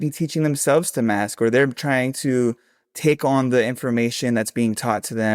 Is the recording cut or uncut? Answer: uncut